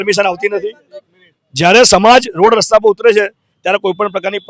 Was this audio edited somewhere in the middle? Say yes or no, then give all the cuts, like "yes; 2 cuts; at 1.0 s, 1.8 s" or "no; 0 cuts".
no; 0 cuts